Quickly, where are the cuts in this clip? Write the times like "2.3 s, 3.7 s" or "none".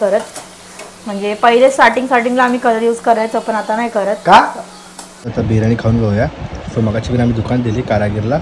5.3 s